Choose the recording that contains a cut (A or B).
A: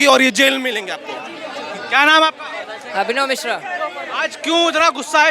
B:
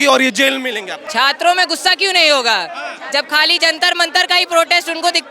B